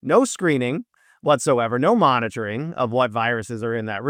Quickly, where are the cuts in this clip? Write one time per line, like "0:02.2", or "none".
none